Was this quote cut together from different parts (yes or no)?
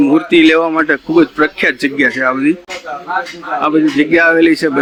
no